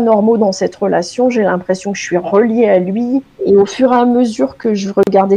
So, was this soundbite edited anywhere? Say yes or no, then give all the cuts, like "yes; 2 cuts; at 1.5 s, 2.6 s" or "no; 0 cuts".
yes; 1 cut; at 3.3 s